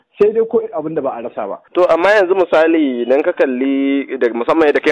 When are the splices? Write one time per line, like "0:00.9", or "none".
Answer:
0:01.6